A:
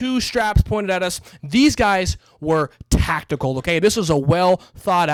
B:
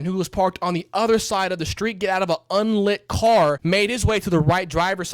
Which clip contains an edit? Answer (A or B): B